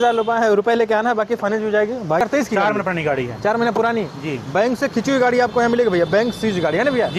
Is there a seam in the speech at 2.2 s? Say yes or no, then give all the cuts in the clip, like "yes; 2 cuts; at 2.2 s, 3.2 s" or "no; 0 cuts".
yes; 1 cut; at 2.2 s